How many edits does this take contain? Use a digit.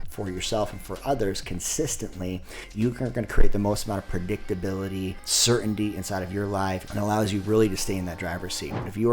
3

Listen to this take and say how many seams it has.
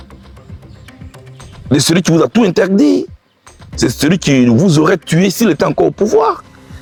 0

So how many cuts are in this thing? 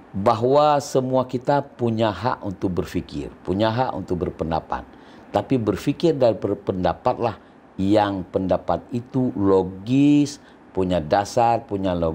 0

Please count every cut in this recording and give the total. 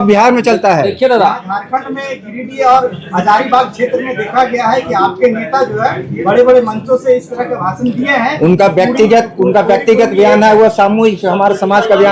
0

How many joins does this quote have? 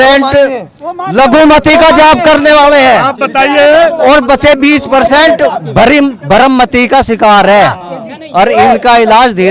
0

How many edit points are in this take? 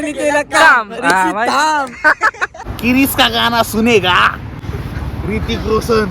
2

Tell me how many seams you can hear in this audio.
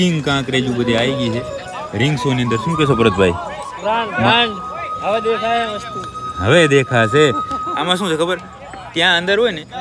0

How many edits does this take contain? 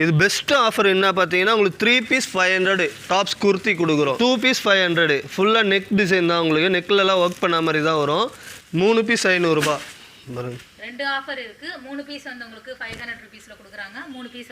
2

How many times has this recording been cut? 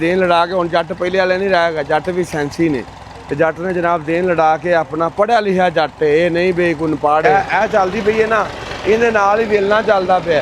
1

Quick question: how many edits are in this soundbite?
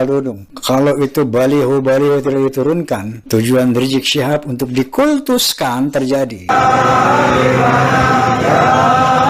2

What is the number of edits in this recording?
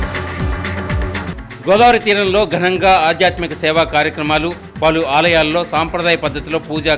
1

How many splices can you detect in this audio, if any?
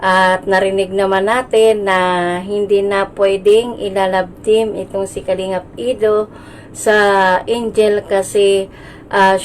1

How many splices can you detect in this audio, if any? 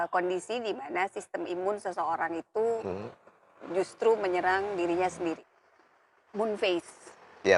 1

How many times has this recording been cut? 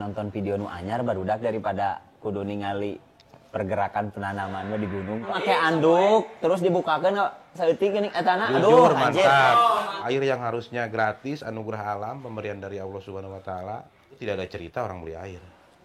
3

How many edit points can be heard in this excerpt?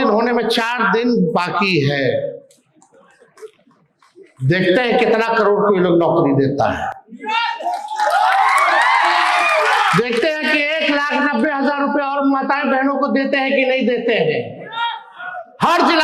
0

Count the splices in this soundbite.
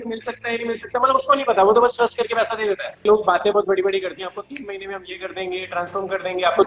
1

